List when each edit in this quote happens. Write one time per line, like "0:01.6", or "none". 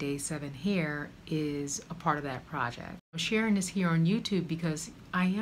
0:03.2